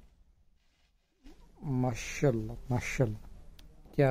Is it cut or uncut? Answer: uncut